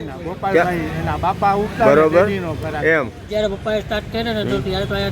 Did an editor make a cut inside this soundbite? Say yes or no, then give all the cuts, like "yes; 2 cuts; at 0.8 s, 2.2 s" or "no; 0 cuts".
yes; 1 cut; at 3.3 s